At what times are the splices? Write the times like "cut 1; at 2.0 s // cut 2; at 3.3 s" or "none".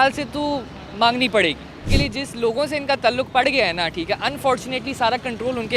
cut 1; at 1.9 s